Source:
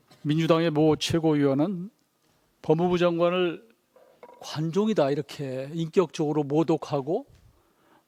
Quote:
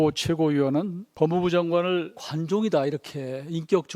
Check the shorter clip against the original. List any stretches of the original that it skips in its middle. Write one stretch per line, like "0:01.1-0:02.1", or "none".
0:01.9-0:02.5
0:03.7-0:04.5